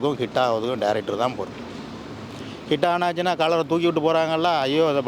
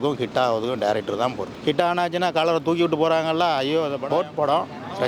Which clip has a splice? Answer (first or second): second